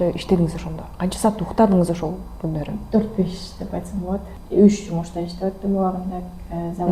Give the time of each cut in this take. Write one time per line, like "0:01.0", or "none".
0:04.3